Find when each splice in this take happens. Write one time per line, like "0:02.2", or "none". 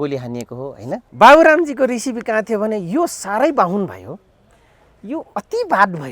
0:01.1